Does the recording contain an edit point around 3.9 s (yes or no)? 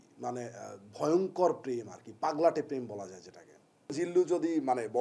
yes